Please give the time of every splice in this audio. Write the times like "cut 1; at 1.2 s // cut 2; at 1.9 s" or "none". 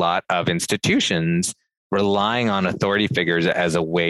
none